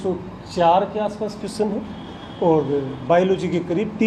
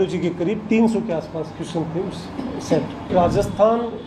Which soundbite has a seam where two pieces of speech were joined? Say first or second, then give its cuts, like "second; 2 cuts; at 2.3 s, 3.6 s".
second; 1 cut; at 3.1 s